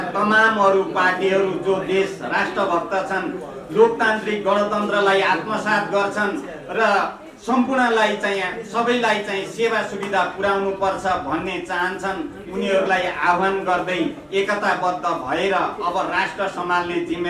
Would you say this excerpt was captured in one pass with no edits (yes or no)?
yes